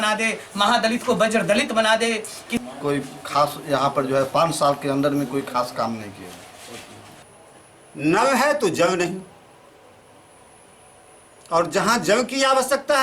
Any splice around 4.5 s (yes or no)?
no